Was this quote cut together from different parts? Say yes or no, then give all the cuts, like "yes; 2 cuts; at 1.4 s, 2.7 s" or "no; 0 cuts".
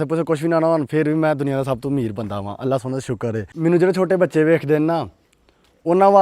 yes; 1 cut; at 3.5 s